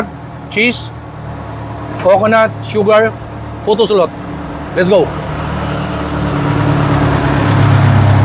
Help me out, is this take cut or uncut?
uncut